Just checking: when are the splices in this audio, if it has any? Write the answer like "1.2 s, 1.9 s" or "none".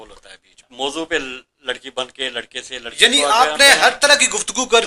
0.9 s